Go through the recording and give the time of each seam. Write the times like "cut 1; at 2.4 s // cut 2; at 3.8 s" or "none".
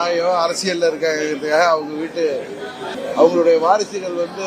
cut 1; at 2.8 s